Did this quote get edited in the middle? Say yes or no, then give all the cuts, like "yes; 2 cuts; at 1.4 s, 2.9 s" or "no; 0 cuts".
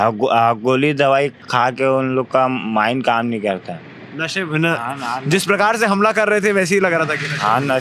no; 0 cuts